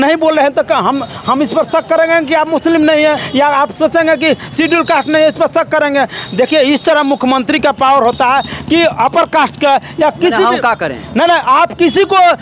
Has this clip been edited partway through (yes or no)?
no